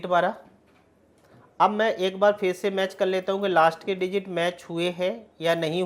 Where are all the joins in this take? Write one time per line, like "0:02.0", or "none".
none